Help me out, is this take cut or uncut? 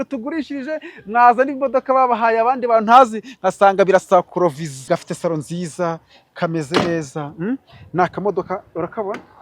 cut